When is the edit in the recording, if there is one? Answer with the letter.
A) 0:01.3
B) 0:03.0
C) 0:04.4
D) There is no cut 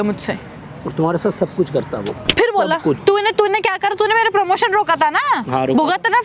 B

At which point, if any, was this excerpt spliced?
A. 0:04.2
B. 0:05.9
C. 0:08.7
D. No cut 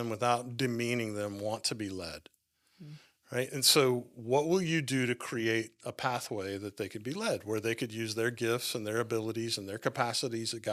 D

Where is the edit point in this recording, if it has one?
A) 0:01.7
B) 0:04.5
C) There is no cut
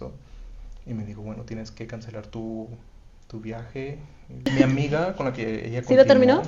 B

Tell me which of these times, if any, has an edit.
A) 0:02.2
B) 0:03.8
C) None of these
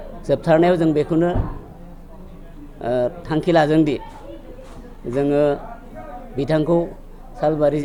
C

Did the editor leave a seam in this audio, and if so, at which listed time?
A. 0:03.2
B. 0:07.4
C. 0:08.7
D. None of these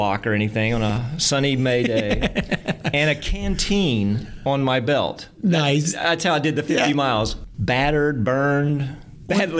B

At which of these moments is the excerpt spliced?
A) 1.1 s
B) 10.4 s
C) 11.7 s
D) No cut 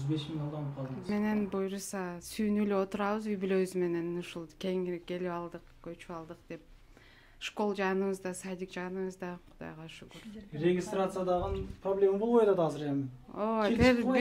A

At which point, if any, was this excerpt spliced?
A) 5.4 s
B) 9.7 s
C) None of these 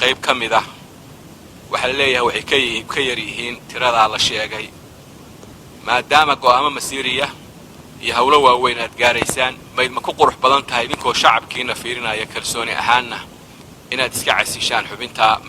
B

